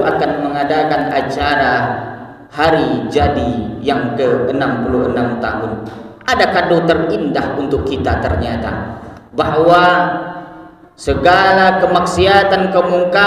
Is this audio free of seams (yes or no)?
yes